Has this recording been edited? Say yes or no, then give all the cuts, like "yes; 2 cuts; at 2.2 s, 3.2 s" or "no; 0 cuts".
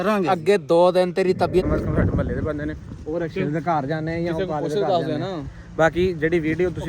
yes; 1 cut; at 1.7 s